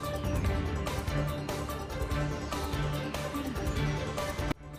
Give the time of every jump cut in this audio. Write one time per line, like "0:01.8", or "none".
none